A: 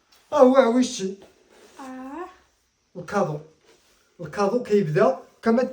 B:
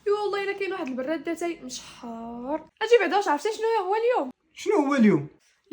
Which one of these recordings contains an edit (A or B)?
B